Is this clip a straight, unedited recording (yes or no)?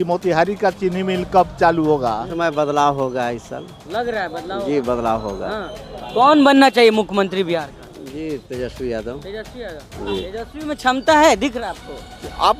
no